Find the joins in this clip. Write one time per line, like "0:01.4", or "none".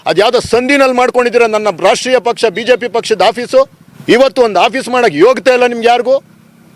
0:03.9